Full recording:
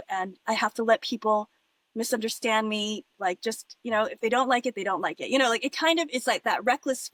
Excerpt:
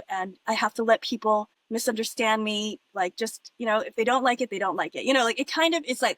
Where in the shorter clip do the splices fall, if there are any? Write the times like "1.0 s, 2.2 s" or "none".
1.6 s